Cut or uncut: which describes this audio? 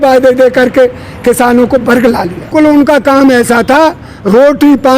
cut